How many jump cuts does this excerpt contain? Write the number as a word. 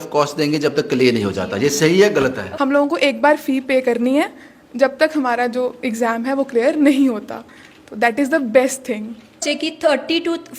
two